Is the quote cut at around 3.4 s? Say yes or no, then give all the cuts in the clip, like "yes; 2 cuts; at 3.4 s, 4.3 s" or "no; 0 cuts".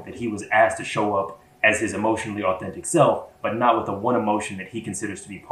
no; 0 cuts